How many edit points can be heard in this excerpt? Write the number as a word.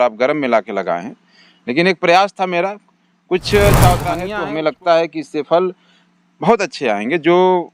one